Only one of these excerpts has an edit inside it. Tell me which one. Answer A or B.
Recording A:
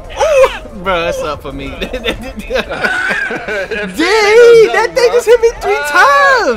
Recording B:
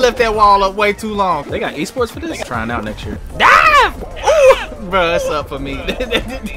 B